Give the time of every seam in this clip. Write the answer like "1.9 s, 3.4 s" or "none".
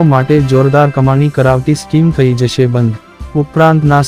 3.2 s